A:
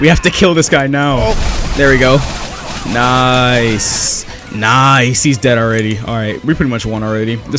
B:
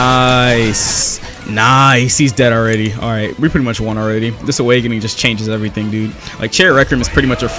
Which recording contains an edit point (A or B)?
A